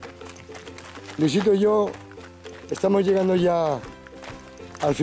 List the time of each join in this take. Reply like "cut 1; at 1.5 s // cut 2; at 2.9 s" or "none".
none